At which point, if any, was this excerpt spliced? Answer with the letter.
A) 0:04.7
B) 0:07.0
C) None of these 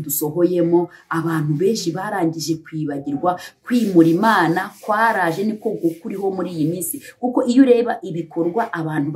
C